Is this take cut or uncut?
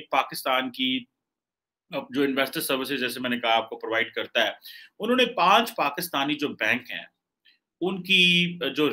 uncut